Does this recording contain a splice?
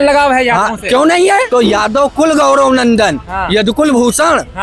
yes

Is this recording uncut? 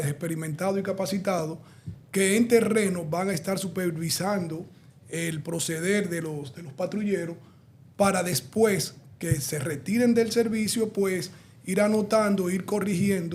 yes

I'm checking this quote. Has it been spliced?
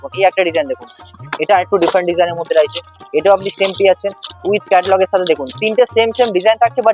no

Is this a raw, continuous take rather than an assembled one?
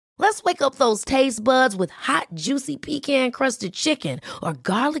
yes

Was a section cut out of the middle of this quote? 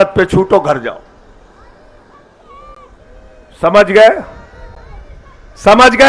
no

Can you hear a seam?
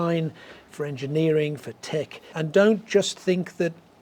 yes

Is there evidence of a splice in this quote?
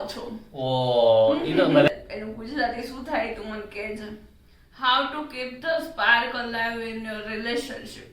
yes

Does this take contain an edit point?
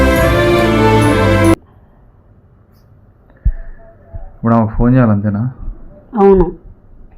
no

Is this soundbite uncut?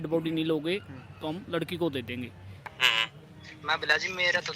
no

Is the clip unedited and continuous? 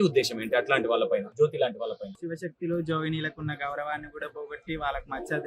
no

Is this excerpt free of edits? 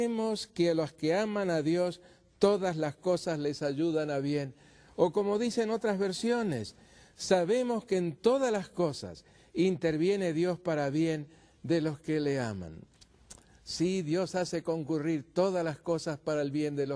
yes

